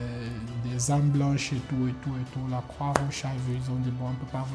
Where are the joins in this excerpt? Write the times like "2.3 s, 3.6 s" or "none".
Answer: none